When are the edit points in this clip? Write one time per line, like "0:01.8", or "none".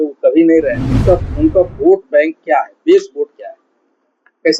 0:01.0